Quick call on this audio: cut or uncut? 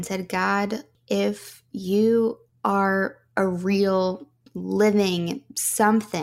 cut